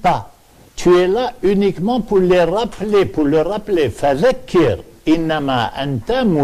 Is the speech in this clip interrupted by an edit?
yes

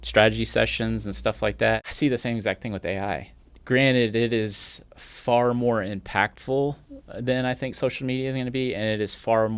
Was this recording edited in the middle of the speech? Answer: yes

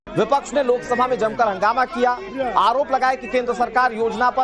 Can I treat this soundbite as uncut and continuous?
yes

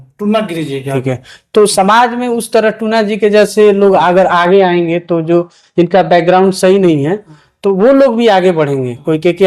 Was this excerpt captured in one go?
yes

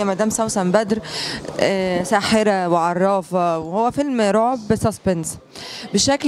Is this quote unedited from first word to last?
yes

